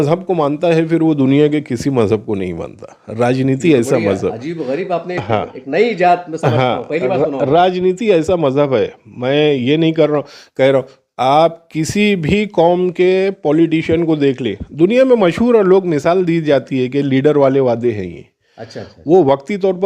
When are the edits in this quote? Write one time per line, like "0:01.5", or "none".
none